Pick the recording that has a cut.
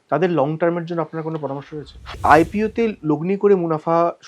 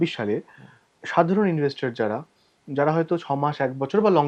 first; 1 cut; at 2.2 s

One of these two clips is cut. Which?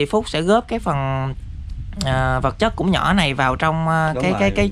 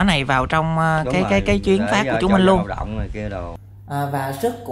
second; 1 cut; at 3.6 s

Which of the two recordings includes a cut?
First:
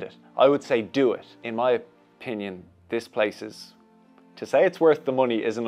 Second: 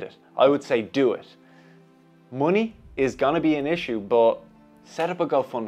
first; 1 cut; at 1.3 s

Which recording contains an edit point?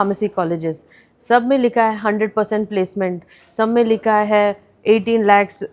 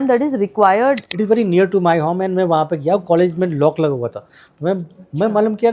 second; 1 cut; at 1.1 s

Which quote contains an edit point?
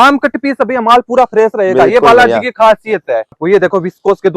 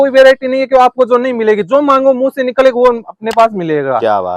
first; 1 cut; at 3.3 s

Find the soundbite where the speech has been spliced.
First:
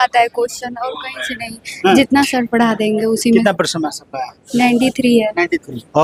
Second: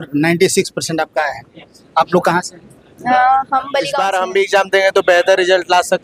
second; 1 cut; at 3.9 s

